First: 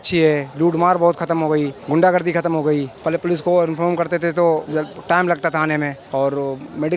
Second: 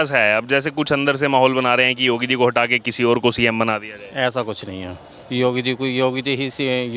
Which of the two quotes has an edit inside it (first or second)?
first